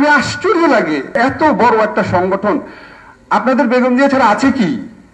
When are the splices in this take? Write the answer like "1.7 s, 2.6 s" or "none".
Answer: 1.1 s